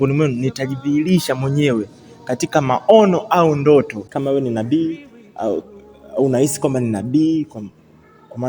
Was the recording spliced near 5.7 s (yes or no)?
no